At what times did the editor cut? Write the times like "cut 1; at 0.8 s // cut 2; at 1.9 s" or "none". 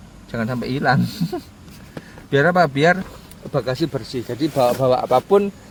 none